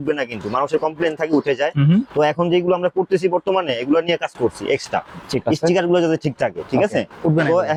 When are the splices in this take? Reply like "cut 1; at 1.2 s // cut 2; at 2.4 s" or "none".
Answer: none